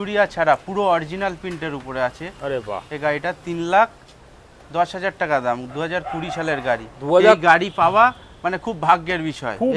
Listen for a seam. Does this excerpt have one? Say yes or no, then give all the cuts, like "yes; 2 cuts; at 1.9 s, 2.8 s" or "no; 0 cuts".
no; 0 cuts